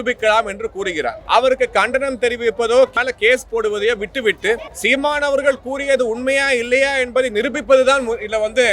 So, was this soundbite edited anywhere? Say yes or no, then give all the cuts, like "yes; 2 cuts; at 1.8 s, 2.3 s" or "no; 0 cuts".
yes; 3 cuts; at 1.2 s, 2.9 s, 4.7 s